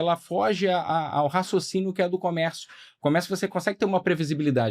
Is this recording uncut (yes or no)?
yes